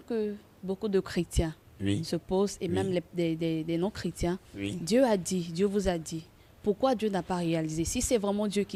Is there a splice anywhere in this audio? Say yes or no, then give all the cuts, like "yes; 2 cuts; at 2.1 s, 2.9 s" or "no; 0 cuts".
no; 0 cuts